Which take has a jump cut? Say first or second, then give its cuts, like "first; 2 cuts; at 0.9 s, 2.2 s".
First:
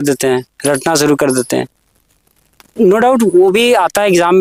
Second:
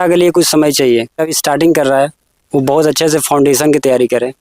second; 1 cut; at 1.3 s